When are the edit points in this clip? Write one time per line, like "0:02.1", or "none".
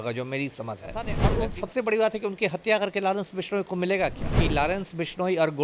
0:01.2
0:04.3